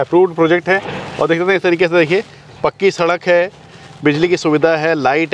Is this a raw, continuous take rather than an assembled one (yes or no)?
yes